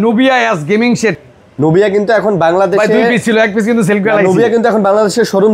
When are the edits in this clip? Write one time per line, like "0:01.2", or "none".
0:01.2